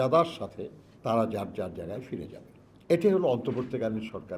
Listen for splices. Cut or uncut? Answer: uncut